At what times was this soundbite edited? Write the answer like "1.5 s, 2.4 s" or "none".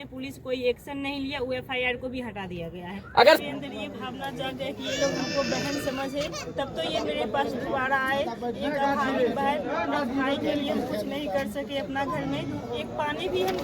3.4 s

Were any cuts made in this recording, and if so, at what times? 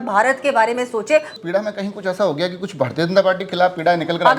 1.3 s

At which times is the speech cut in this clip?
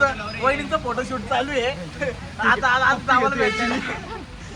none

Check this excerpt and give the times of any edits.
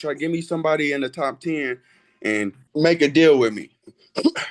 2.6 s

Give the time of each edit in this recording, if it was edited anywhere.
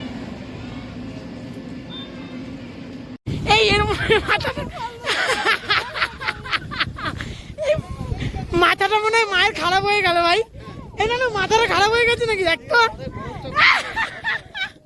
3.1 s

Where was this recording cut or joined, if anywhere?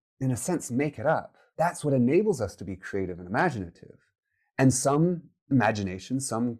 1.4 s

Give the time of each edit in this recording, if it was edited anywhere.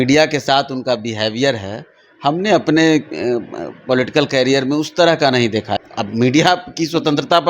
5.7 s

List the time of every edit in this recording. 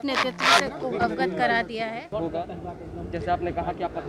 2.1 s

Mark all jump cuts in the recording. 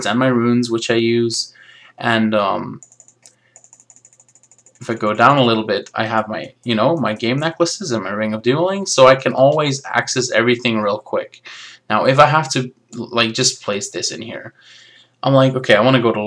13.8 s

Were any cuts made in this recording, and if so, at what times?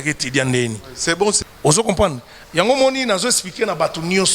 1.4 s

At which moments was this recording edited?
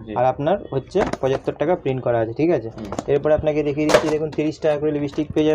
none

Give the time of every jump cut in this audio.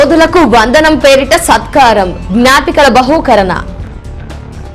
3.7 s

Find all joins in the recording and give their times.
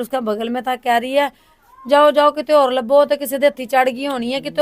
none

